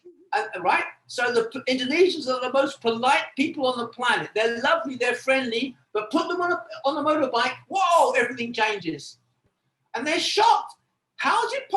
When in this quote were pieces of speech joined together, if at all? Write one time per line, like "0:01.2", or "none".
0:09.4

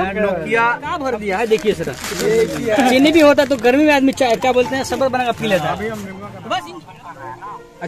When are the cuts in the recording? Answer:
0:00.9
0:06.6

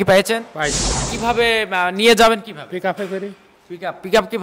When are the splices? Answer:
0:01.0

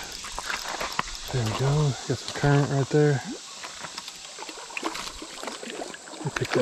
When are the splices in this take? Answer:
none

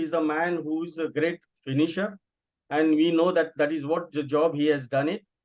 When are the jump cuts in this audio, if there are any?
none

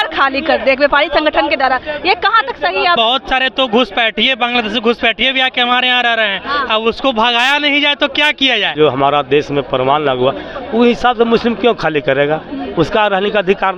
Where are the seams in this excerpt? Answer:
0:03.0
0:08.7

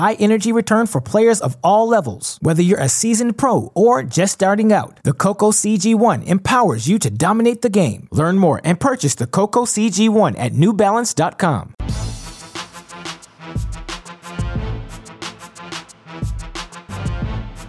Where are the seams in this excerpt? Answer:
0:11.7
0:15.6

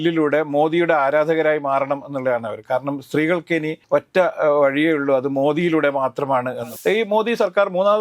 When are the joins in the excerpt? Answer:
0:03.8
0:06.5

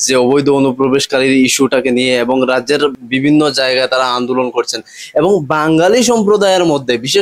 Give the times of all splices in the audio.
0:02.9

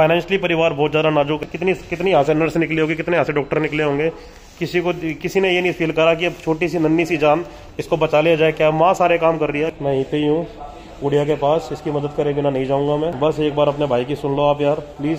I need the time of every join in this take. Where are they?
0:01.4
0:09.8
0:13.1

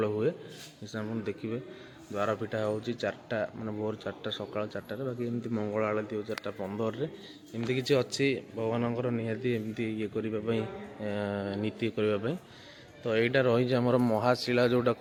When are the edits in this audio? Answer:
none

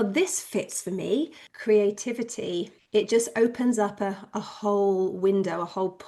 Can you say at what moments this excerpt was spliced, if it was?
0:01.4
0:02.8

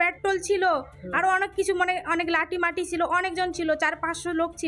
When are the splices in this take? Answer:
none

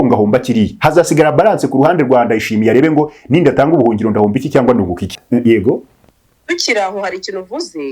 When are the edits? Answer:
0:05.2

